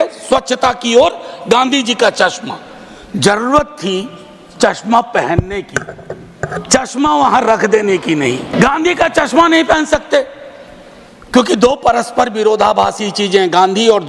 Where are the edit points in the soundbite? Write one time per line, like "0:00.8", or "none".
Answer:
0:08.5